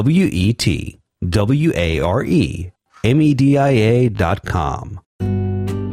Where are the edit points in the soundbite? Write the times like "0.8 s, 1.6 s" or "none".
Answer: 5.0 s